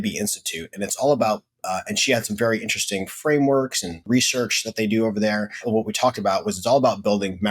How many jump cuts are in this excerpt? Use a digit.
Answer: 2